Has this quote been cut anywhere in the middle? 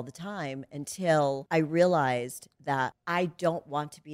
yes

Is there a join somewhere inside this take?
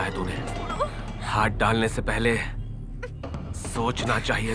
no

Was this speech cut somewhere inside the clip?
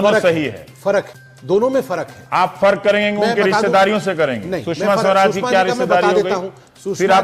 no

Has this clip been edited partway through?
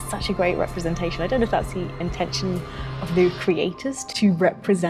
no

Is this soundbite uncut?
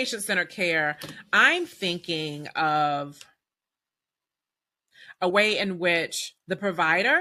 yes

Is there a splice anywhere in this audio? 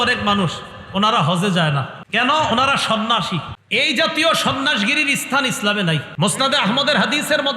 yes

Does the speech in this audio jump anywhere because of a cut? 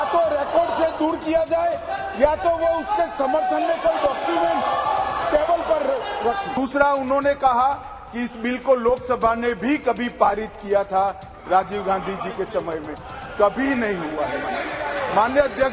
yes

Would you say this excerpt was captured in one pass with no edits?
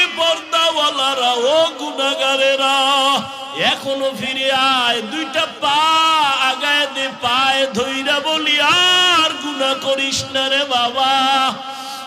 no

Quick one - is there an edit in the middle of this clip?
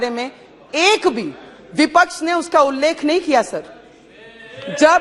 no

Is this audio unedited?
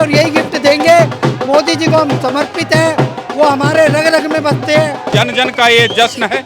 no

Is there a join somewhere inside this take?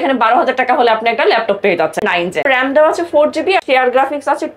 yes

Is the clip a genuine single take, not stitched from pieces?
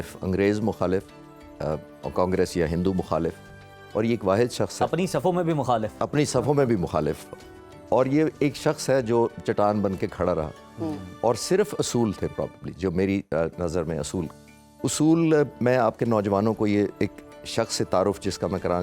yes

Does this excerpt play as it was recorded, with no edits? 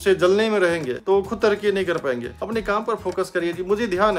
yes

